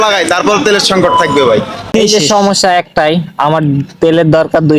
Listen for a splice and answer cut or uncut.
cut